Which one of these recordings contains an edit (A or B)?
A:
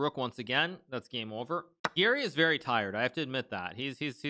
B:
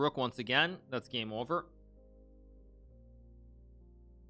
A